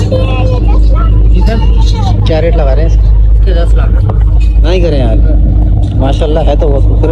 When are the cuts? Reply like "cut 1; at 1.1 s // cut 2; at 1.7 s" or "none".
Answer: none